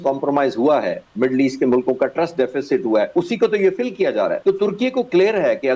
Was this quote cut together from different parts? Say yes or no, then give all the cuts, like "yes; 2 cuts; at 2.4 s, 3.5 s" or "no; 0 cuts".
yes; 1 cut; at 4.4 s